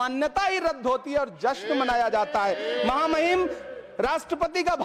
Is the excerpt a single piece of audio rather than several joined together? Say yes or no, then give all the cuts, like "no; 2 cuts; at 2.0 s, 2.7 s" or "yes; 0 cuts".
yes; 0 cuts